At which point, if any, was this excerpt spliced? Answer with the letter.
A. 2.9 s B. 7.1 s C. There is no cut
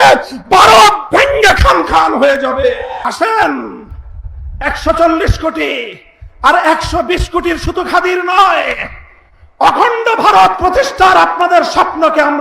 A